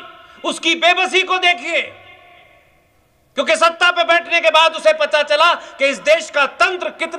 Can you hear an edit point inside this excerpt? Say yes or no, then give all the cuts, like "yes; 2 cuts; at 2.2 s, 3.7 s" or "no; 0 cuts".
no; 0 cuts